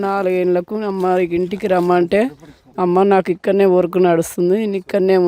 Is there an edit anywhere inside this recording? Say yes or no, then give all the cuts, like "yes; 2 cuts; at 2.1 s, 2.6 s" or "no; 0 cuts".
no; 0 cuts